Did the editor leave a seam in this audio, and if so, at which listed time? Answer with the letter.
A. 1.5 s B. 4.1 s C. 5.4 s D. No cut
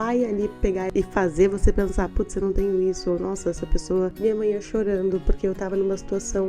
B